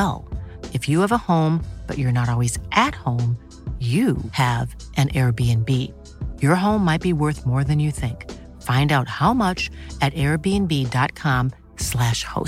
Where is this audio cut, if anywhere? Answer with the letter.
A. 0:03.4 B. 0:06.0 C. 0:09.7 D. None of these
D